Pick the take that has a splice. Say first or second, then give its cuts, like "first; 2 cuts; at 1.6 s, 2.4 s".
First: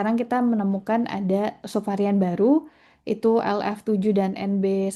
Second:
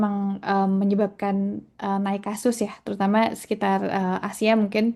first; 1 cut; at 1.6 s